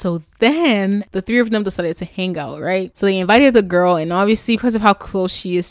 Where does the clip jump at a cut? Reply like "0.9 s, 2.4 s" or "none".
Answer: 1.1 s, 2.9 s